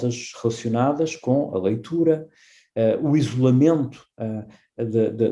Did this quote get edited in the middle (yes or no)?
no